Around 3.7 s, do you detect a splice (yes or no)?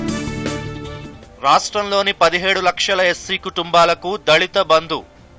no